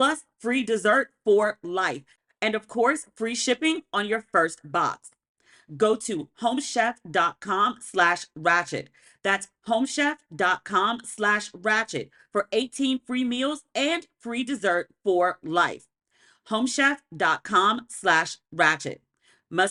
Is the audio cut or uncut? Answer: uncut